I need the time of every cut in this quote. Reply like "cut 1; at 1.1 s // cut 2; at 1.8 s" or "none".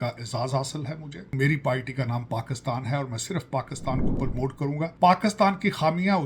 cut 1; at 1.3 s // cut 2; at 4.3 s